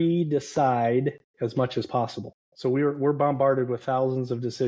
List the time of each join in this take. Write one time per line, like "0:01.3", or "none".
none